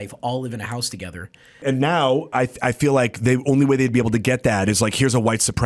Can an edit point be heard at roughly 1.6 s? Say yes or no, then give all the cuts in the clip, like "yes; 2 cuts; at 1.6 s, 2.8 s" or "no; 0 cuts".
yes; 1 cut; at 1.6 s